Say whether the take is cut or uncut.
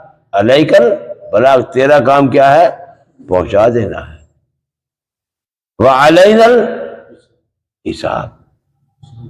uncut